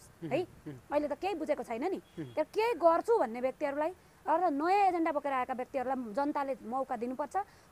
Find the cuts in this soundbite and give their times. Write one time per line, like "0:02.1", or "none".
none

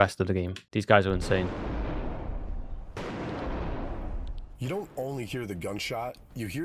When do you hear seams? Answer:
0:01.5

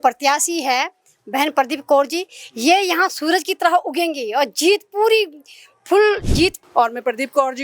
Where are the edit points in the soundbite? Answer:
0:06.6

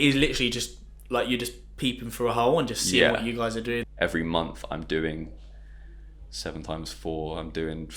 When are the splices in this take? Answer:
0:03.8

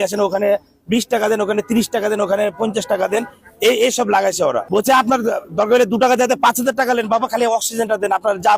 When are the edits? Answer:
0:04.6

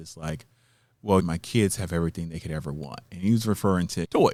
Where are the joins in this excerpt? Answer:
none

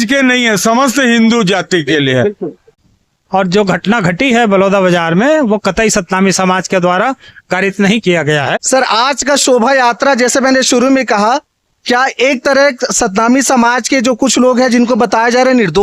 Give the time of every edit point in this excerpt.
0:02.7
0:08.5

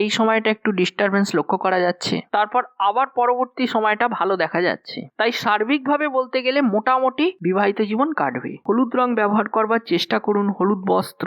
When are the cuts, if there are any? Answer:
0:08.6

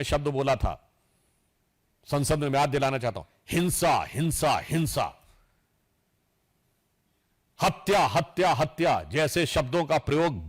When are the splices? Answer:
none

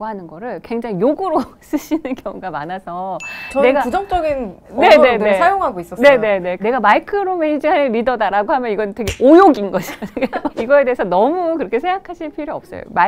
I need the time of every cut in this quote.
none

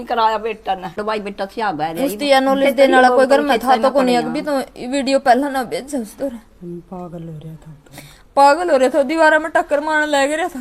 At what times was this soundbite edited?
0:01.0

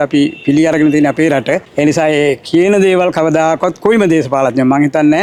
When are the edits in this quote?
none

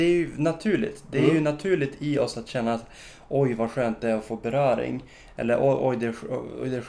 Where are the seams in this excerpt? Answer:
none

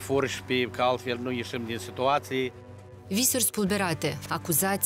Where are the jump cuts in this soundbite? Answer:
0:03.0

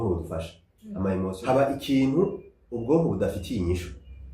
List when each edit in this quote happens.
0:01.4

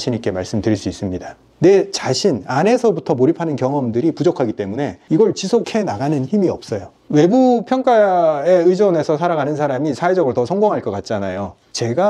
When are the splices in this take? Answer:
0:01.5
0:06.9

